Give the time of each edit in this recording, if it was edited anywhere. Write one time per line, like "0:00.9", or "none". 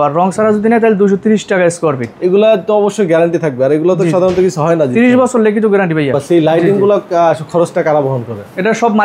0:02.1
0:06.2